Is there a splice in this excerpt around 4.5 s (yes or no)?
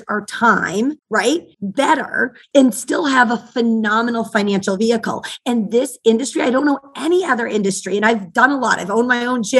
no